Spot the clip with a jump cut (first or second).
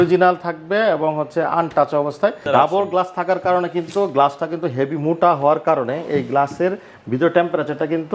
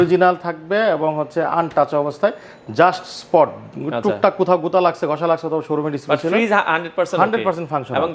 first